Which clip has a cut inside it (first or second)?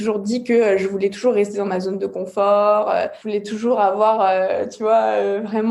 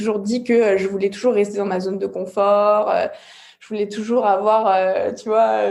first